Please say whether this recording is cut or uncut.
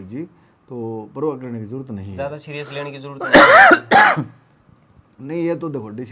uncut